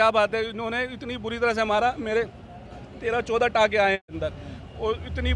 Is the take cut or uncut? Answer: cut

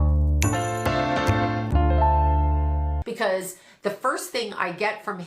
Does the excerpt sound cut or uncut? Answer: cut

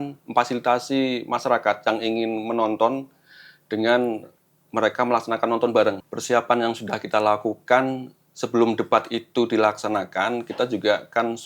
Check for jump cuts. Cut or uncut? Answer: cut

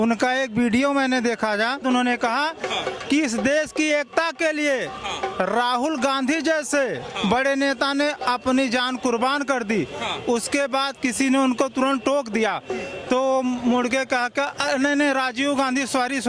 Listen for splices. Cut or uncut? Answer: cut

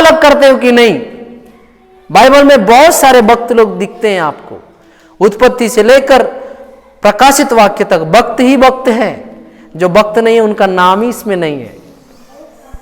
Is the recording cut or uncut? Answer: uncut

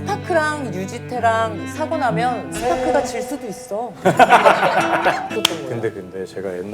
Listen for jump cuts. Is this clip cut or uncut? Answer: cut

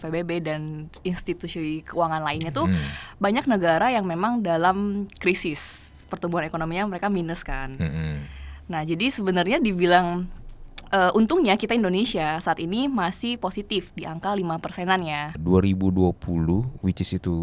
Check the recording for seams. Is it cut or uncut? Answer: cut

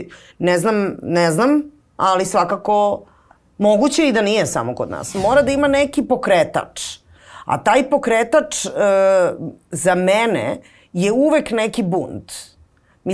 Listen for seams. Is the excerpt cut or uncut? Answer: cut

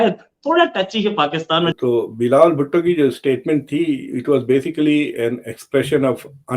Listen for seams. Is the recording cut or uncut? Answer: cut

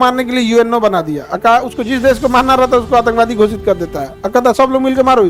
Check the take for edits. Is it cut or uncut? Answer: uncut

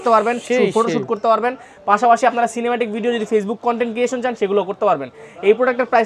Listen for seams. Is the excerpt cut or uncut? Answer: uncut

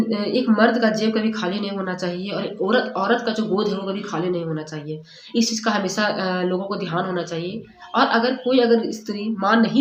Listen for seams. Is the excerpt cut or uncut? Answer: uncut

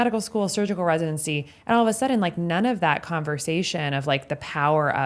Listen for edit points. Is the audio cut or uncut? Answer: uncut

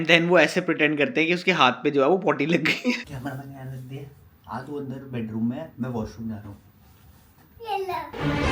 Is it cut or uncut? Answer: cut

